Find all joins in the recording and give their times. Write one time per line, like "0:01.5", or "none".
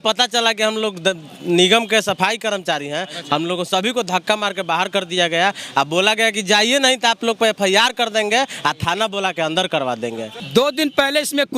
0:10.3